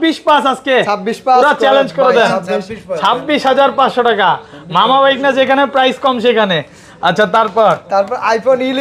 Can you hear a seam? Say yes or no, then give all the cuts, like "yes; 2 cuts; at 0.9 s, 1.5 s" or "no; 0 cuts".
no; 0 cuts